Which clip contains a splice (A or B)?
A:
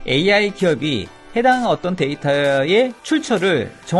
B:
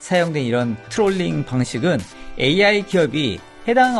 A